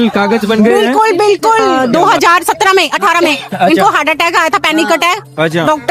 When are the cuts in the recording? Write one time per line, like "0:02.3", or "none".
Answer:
0:01.7